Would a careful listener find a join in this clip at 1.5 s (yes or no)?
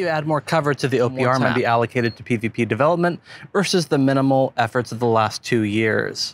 yes